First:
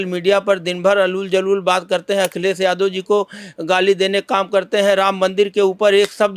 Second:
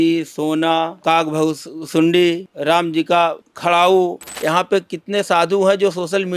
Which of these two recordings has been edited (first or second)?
second